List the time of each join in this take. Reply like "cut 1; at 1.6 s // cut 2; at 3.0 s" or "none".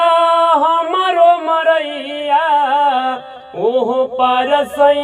none